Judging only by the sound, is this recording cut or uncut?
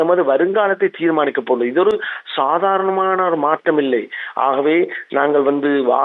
uncut